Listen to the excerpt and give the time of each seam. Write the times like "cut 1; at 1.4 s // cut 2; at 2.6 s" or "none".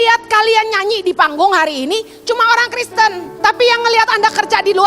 cut 1; at 3.3 s